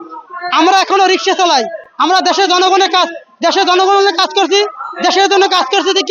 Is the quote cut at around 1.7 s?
no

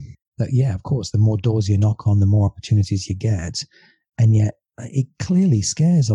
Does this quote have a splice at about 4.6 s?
yes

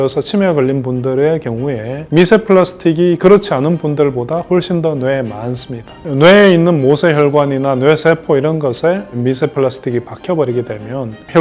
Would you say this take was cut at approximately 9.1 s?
no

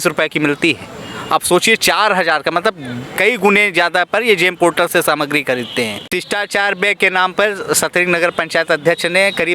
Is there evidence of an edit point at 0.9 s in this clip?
no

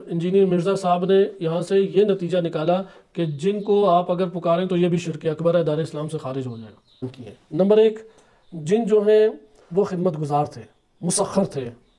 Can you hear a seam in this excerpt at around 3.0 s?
no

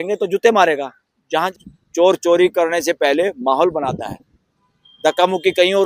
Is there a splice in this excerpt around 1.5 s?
yes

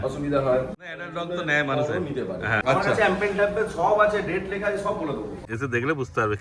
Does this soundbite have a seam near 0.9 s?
yes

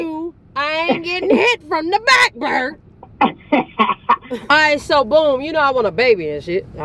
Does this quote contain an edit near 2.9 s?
no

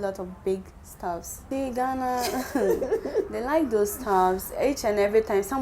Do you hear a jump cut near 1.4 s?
yes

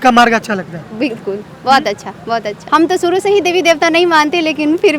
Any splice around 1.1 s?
no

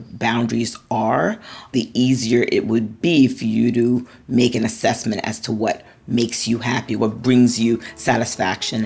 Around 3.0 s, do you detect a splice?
yes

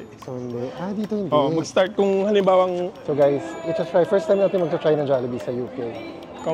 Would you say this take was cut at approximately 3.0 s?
yes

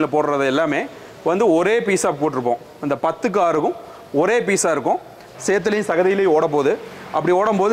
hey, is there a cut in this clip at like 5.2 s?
yes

